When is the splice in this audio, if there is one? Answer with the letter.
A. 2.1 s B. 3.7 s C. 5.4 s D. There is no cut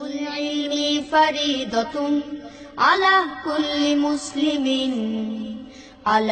D